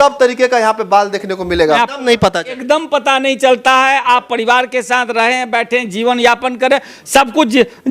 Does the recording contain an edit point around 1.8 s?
yes; 1 cut; at 1.8 s

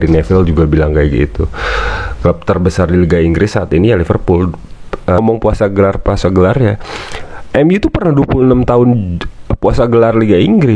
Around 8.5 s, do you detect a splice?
no; 1 cut; at 5.2 s

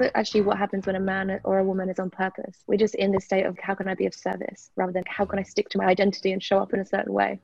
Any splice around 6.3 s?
no; 3 cuts; at 2.5 s, 3.5 s, 5.1 s

